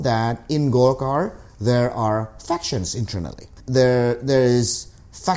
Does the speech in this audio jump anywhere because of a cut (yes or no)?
no